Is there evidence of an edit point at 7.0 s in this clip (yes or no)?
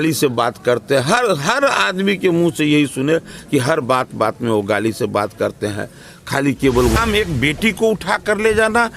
yes